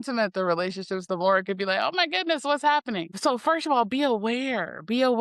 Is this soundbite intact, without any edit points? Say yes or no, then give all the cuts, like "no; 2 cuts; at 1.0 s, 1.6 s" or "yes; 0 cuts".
no; 1 cut; at 3.2 s